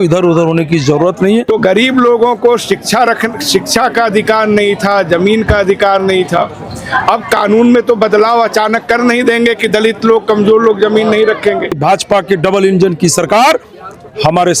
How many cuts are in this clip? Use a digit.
2